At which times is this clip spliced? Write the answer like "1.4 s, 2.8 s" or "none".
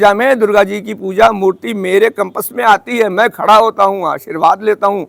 none